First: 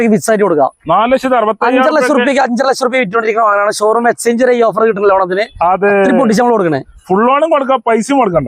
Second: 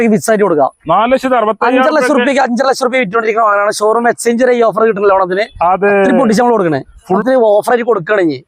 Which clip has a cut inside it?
second; 1 cut; at 7.2 s

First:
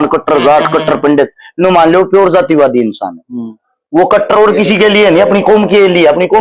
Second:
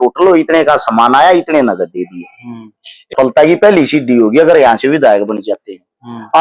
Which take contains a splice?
second; 1 cut; at 3.1 s

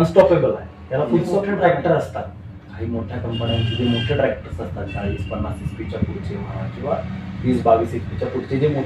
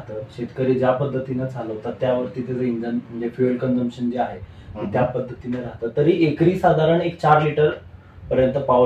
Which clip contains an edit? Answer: first; 1 cut; at 1.4 s

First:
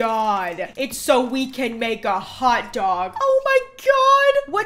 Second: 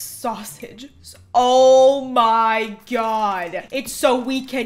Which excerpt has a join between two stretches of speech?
first; 1 cut; at 3.1 s

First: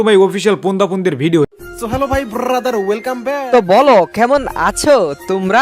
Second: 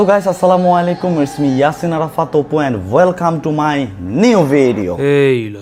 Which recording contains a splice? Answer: first; 1 cut; at 1.5 s

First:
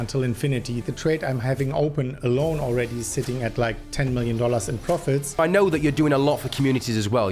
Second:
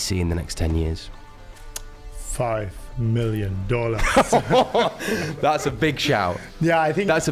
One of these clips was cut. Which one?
first; 2 cuts; at 0.8 s, 5.4 s

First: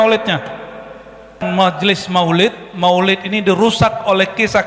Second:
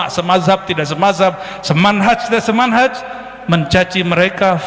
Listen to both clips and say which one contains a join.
first; 1 cut; at 1.4 s

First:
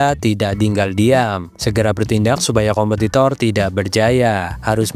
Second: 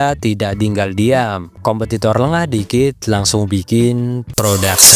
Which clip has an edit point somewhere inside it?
second; 1 cut; at 1.5 s

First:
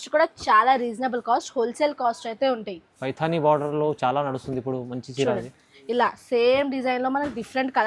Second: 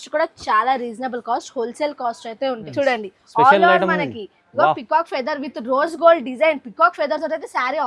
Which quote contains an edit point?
second; 1 cut; at 2.6 s

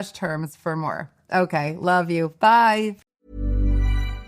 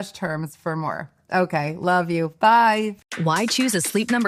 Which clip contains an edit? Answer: first; 1 cut; at 3.1 s

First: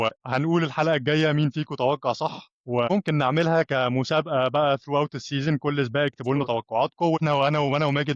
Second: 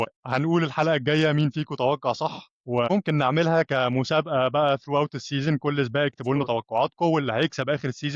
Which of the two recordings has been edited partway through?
first; 1 cut; at 7.2 s

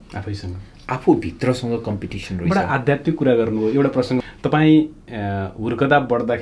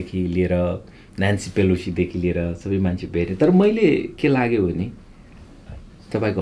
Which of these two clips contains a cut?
first; 1 cut; at 4.2 s

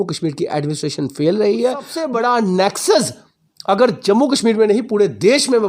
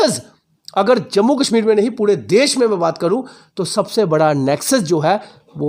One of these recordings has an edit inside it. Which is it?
first; 1 cut; at 1.8 s

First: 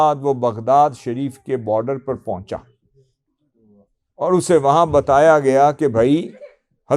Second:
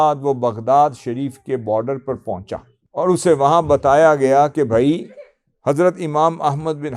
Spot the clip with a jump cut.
second; 1 cut; at 2.8 s

